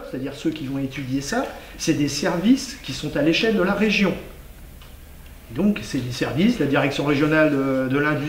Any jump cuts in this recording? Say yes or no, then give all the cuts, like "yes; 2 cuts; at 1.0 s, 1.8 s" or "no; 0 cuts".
no; 0 cuts